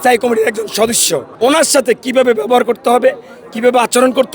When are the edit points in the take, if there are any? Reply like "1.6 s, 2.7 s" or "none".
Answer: 1.3 s